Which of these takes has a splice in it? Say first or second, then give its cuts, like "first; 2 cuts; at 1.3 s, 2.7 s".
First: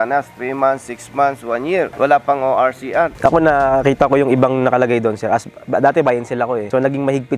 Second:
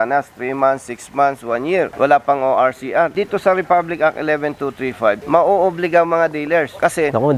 first; 1 cut; at 3.1 s